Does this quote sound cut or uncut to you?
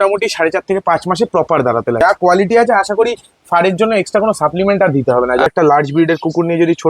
cut